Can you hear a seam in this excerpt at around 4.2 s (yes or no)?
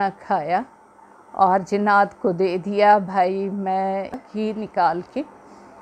yes